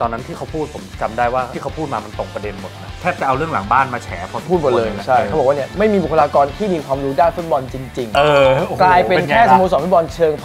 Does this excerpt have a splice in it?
yes; 1 cut; at 1.5 s

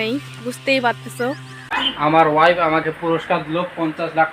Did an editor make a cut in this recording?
yes; 1 cut; at 1.5 s

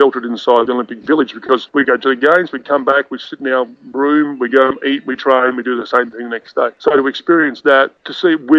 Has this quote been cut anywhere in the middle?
no; 0 cuts

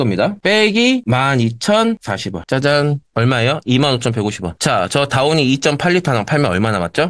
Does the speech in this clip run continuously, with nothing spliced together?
yes; 0 cuts

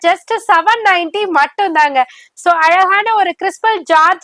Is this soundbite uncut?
yes; 0 cuts

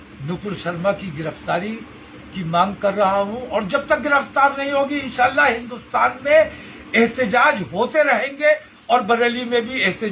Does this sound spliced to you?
no; 0 cuts

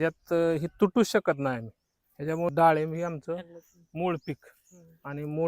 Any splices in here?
yes; 1 cut; at 2.5 s

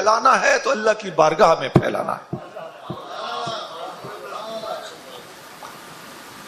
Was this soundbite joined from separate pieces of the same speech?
no; 0 cuts

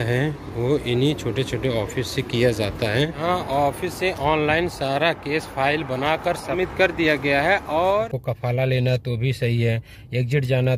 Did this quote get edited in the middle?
yes; 2 cuts; at 3.2 s, 8.1 s

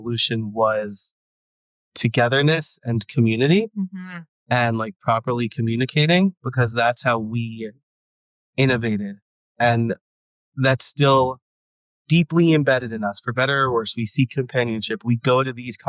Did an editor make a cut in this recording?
no; 0 cuts

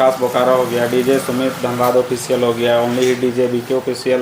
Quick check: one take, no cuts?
yes; 0 cuts

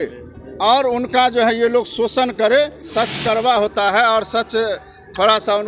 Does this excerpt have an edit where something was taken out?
yes; 1 cut; at 2.8 s

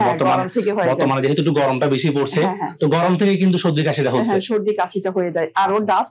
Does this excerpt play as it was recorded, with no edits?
yes; 0 cuts

